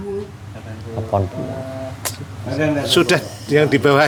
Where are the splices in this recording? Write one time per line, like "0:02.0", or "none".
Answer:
none